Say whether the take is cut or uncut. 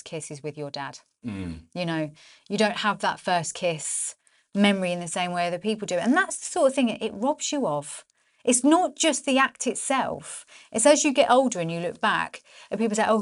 uncut